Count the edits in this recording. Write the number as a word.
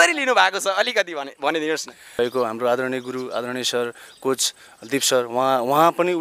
one